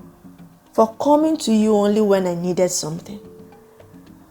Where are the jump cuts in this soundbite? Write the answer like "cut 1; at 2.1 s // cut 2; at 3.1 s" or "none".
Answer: cut 1; at 3.2 s